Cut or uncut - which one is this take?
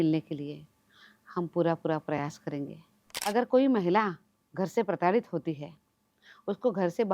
cut